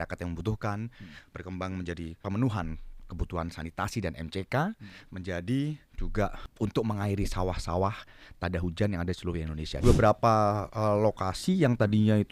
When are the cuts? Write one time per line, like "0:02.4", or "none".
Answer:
0:02.2
0:06.4
0:09.8